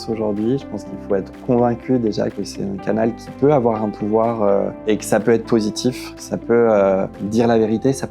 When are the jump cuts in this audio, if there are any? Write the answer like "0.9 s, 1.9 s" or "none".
2.4 s, 4.8 s